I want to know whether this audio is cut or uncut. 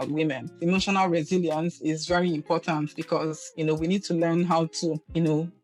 uncut